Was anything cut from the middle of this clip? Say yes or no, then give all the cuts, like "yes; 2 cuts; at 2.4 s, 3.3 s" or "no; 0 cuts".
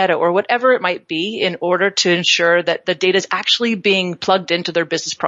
no; 0 cuts